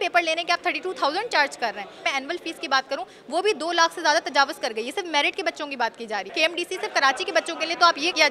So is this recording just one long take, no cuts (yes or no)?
no